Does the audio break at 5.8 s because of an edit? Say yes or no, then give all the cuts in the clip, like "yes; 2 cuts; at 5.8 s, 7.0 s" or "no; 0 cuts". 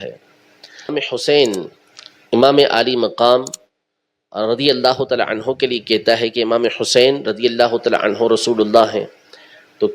no; 1 cut; at 1.0 s